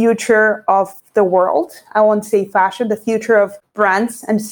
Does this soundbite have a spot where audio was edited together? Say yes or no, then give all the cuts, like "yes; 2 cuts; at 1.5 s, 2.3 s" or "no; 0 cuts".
yes; 2 cuts; at 1.0 s, 3.6 s